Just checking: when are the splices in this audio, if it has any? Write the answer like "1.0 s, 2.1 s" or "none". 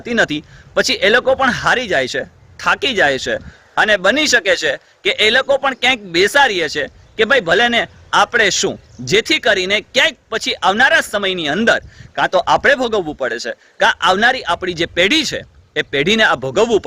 none